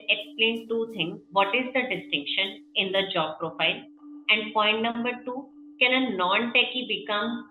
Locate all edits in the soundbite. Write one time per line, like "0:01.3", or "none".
none